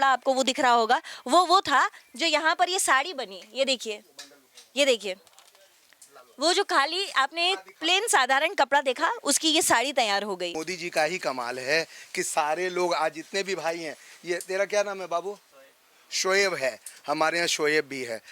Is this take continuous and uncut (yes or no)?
no